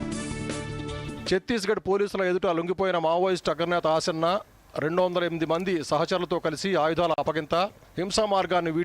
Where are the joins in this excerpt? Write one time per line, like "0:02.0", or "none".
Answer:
0:01.0